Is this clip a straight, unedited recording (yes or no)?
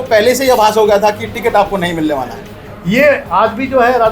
no